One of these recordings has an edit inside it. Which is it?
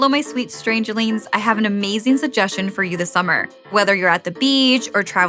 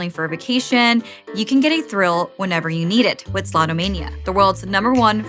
first; 1 cut; at 3.7 s

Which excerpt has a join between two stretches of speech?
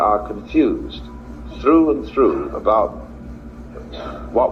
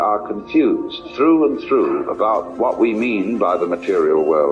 second; 2 cuts; at 1.0 s, 2.4 s

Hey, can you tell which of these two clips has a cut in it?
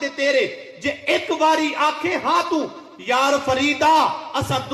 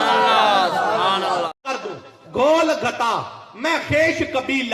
second; 1 cut; at 1.6 s

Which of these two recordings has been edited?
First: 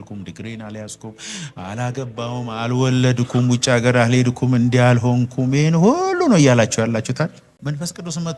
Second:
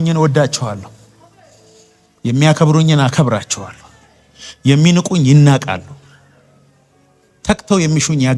first; 1 cut; at 7.5 s

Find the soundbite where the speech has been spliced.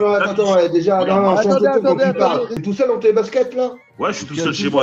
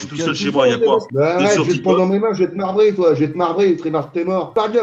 first; 1 cut; at 2.6 s

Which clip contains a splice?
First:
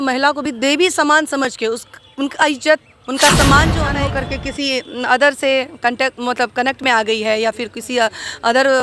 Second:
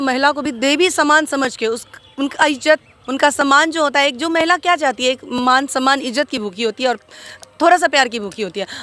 first; 1 cut; at 3.9 s

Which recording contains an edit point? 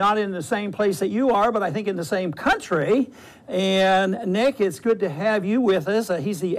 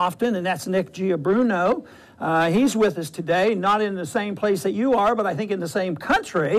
first; 1 cut; at 3.9 s

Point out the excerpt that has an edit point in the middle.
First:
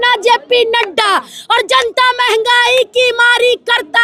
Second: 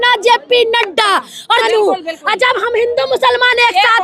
second; 1 cut; at 1.6 s

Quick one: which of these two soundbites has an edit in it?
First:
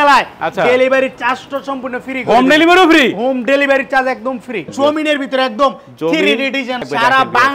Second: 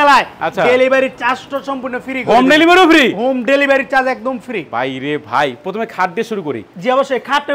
first; 2 cuts; at 4.7 s, 6.8 s

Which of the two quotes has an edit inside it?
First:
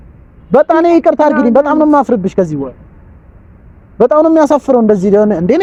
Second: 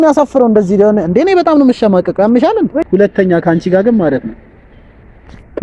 second; 1 cut; at 2.8 s

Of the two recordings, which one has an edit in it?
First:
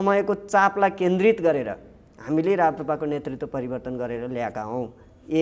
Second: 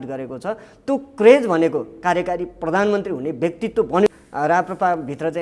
second; 1 cut; at 4.1 s

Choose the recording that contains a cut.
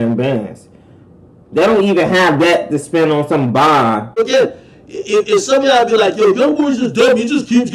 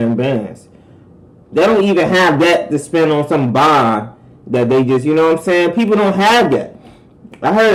first; 1 cut; at 4.2 s

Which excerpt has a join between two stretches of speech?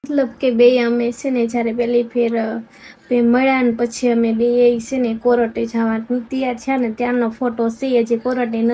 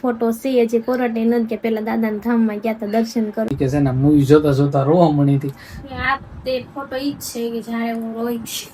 second; 1 cut; at 3.5 s

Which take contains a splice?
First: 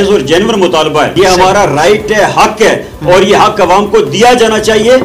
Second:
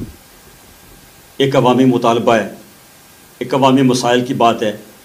first; 1 cut; at 1.1 s

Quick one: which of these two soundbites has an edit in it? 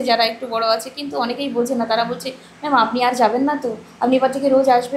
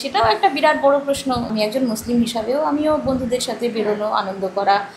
second; 1 cut; at 1.5 s

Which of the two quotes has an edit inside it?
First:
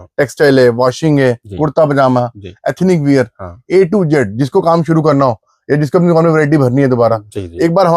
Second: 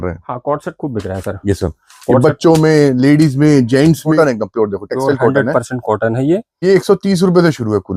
second; 2 cuts; at 4.2 s, 6.6 s

